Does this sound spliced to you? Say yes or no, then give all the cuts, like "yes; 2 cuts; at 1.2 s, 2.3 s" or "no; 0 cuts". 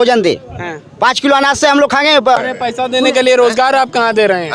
yes; 1 cut; at 2.4 s